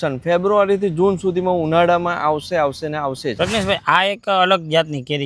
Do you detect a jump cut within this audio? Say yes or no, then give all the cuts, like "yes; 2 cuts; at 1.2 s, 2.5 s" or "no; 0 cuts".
yes; 1 cut; at 3.4 s